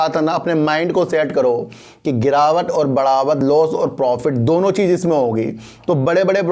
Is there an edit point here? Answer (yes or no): no